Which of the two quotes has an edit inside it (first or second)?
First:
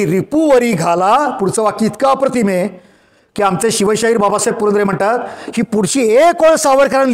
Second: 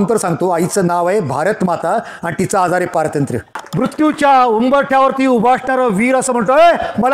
second